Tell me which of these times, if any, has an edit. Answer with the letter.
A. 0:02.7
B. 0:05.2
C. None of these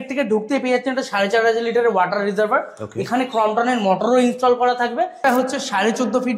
B